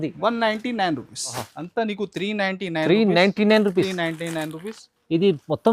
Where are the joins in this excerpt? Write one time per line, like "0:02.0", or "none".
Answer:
0:01.5